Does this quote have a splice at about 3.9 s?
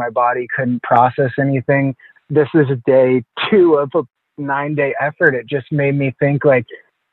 no; 1 cut; at 2.1 s

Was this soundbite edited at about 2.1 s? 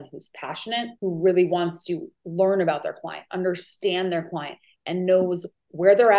yes; 2 cuts; at 0.9 s, 2.1 s

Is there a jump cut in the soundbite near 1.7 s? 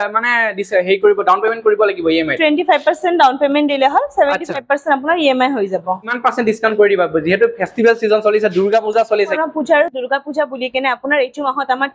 no; 2 cuts; at 6.2 s, 9.4 s

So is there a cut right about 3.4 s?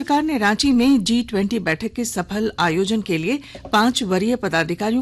no; 0 cuts

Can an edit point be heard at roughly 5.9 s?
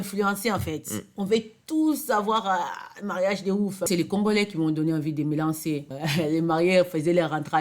yes; 2 cuts; at 3.9 s, 5.9 s

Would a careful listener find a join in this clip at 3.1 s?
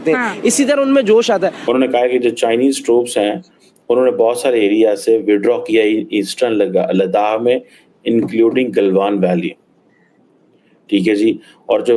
no; 1 cut; at 1.7 s

